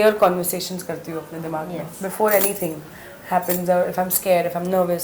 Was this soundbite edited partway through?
no; 0 cuts

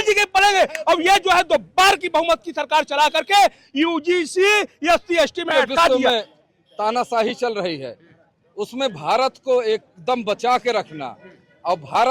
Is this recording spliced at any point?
yes; 1 cut; at 5.9 s

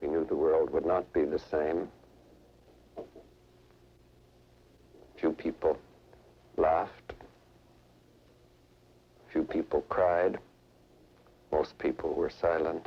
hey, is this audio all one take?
yes; 0 cuts

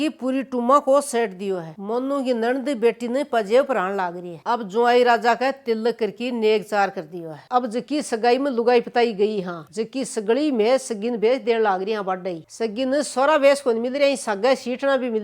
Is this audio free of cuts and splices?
no; 4 cuts; at 1.7 s, 4.3 s, 7.4 s, 12.4 s

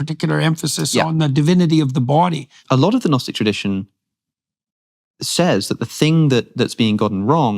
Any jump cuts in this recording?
yes; 1 cut; at 2.6 s

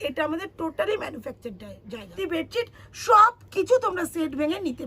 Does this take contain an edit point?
yes; 1 cut; at 2.1 s

